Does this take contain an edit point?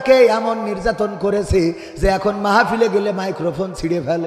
no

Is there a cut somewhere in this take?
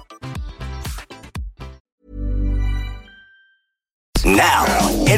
yes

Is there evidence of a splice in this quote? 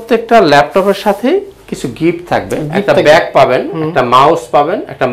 no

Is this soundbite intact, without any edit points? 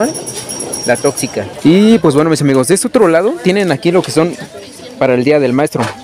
no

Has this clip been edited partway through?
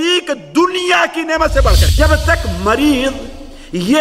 yes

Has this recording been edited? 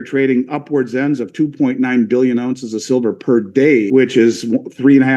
yes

